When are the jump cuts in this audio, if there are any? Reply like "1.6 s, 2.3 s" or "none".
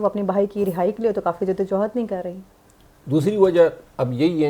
none